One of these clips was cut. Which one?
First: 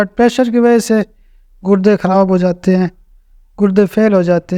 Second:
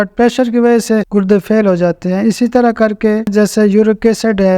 second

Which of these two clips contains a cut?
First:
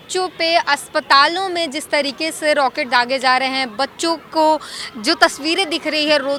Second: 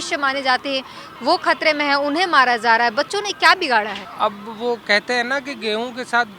second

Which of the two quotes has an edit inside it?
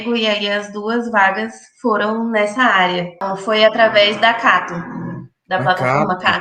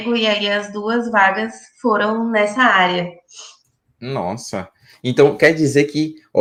first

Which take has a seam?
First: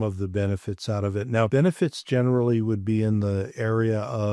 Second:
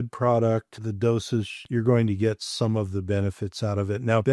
second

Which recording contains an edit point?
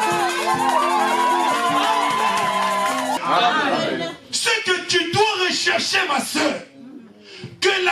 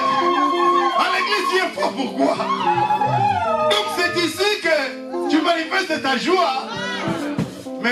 first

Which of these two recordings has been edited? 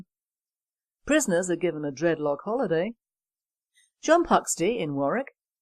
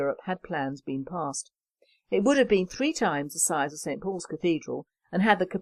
first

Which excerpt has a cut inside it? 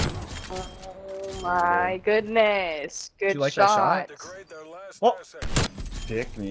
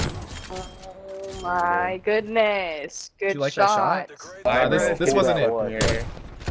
second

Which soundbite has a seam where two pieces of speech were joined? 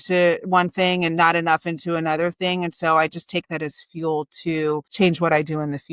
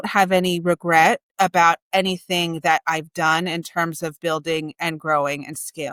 first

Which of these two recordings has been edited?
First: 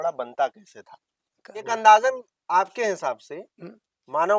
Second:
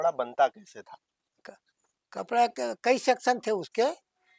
first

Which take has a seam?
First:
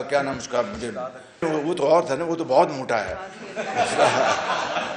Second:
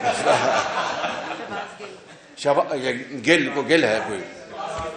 first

